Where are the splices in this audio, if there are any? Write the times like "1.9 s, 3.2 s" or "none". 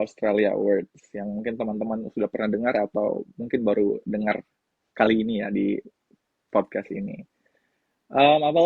none

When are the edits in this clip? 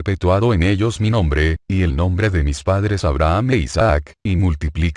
none

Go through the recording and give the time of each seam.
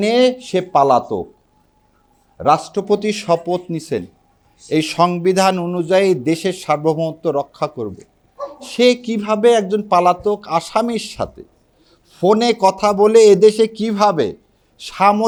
none

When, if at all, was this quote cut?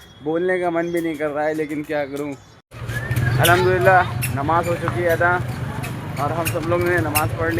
2.5 s

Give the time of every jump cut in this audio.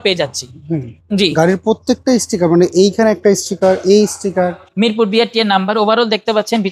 0.9 s, 4.6 s

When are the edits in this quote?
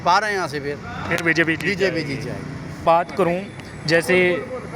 none

